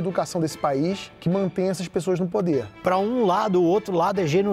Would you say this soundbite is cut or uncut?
cut